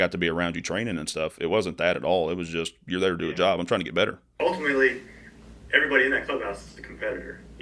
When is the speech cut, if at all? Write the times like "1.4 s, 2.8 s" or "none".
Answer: 4.4 s